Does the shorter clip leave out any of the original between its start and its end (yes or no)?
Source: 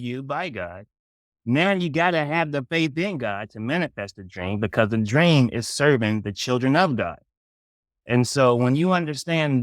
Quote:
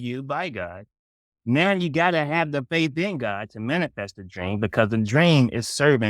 no